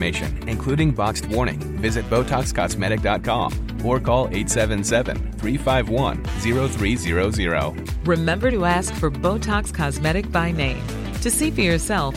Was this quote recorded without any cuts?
yes; 0 cuts

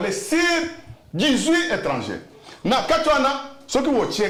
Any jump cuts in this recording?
no; 0 cuts

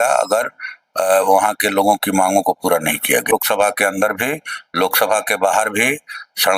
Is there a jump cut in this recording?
yes; 1 cut; at 3.3 s

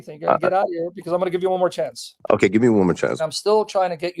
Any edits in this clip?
yes; 1 cut; at 3.2 s

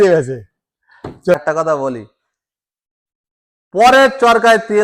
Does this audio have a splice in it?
yes; 1 cut; at 1.3 s

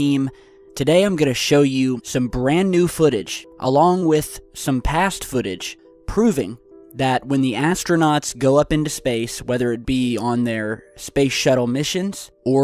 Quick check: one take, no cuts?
no; 1 cut; at 9.8 s

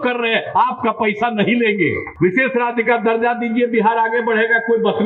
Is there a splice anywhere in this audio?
yes; 1 cut; at 2.1 s

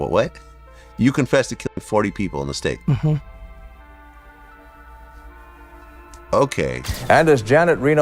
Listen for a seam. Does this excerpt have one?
yes; 1 cut; at 6.9 s

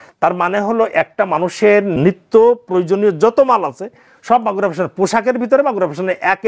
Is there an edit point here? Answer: yes; 1 cut; at 2.0 s

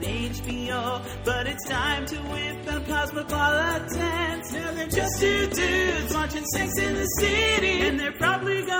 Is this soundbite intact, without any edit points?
yes; 0 cuts

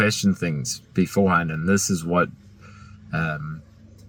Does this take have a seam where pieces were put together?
no; 0 cuts

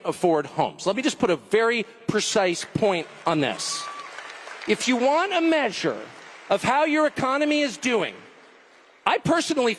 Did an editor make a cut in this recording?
no; 0 cuts

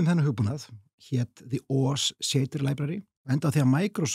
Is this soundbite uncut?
no; 1 cut; at 3.1 s

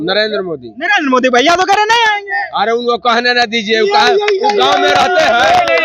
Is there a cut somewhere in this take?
no; 0 cuts

